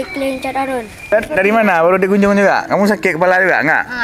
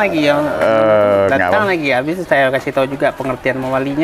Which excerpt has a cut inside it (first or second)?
first